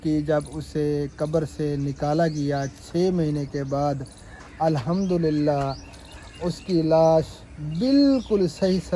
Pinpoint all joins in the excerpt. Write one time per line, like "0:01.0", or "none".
none